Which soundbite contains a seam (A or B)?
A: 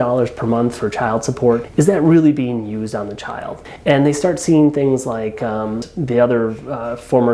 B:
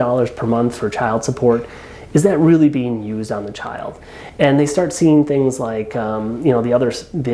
A